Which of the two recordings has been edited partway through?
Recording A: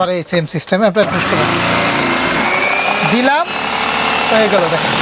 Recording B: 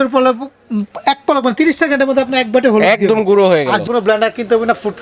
B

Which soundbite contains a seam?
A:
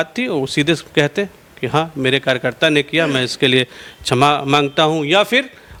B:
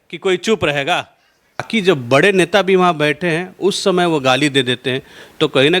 B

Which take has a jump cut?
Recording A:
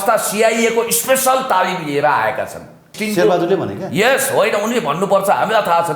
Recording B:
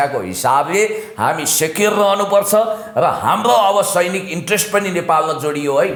A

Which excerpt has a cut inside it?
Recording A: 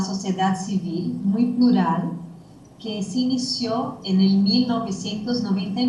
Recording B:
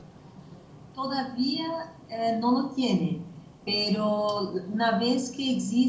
A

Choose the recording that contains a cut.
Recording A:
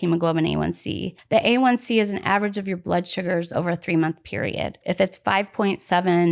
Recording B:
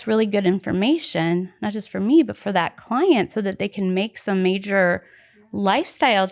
A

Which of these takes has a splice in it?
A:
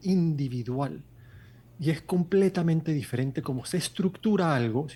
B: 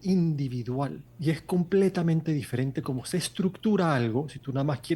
B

